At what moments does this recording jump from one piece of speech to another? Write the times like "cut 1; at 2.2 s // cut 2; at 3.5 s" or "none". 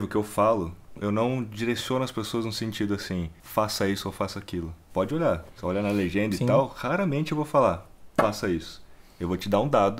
cut 1; at 1.0 s // cut 2; at 3.4 s // cut 3; at 4.8 s // cut 4; at 7.9 s